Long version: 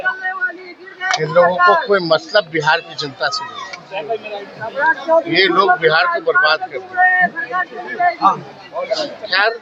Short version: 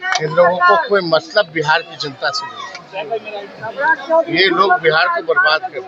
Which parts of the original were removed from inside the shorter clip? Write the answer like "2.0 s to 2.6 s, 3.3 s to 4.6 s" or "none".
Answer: none